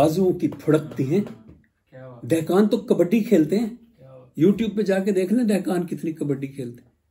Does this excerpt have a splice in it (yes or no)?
no